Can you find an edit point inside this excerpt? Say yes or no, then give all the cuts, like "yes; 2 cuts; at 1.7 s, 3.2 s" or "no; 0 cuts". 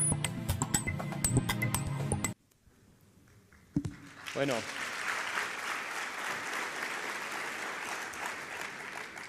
yes; 1 cut; at 2.3 s